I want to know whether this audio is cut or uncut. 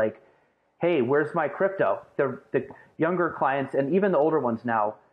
cut